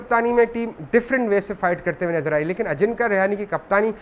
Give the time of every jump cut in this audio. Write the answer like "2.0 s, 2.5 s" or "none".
none